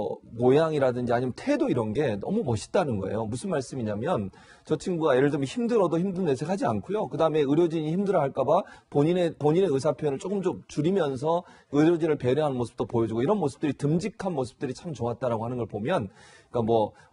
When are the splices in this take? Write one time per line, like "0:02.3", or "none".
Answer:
0:13.1